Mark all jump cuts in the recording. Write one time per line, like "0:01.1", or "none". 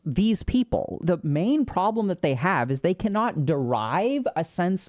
none